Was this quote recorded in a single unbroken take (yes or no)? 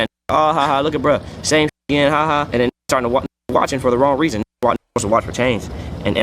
no